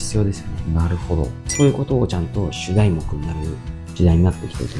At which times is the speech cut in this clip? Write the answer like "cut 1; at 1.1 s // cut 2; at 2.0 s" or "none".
cut 1; at 1.4 s